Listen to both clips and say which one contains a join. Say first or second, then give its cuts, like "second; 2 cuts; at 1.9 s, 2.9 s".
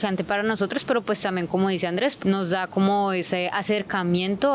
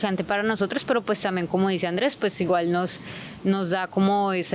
first; 1 cut; at 2.2 s